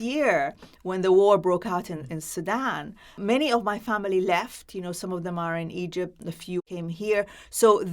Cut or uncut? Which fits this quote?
cut